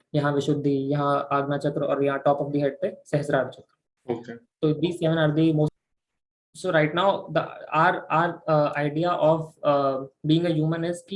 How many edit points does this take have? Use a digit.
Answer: 1